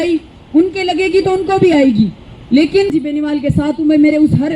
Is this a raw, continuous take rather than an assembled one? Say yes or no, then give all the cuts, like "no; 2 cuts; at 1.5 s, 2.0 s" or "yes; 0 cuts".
no; 1 cut; at 2.9 s